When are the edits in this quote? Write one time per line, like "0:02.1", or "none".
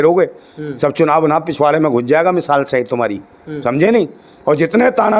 none